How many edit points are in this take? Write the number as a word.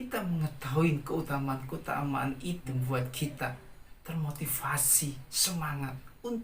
one